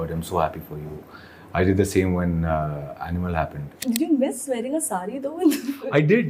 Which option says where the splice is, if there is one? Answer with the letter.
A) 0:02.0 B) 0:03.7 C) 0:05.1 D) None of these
B